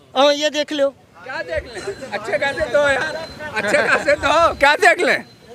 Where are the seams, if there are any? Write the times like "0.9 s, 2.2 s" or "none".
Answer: none